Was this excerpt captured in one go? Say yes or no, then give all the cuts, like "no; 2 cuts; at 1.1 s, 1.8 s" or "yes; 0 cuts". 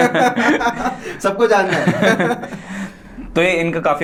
yes; 0 cuts